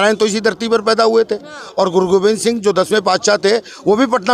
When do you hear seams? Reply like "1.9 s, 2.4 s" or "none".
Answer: none

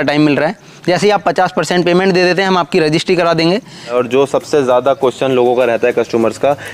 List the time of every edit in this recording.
3.9 s

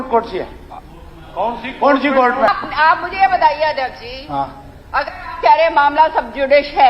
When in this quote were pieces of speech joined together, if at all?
2.5 s

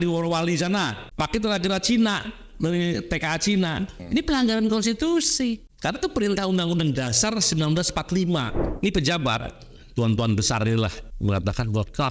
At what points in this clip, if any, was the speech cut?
1.0 s, 3.9 s, 5.7 s, 8.6 s, 11.1 s

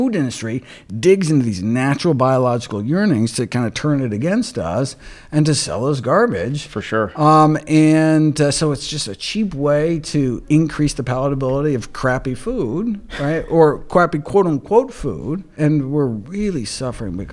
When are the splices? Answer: 15.5 s

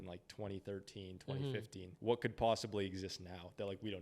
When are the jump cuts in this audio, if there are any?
1.8 s

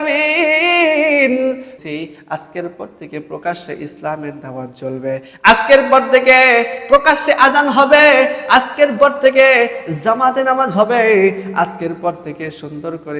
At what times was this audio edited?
1.7 s

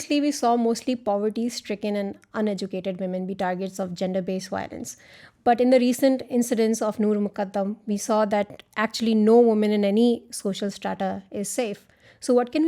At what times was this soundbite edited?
none

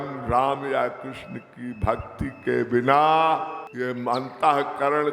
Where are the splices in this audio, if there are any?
3.6 s

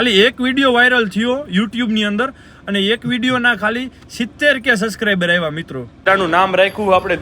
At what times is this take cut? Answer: 6.1 s

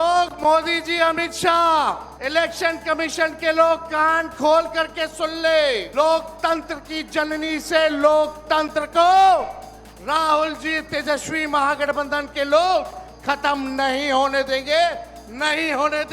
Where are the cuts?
2.1 s, 5.9 s

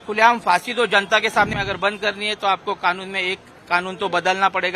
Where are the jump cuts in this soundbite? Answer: 1.5 s

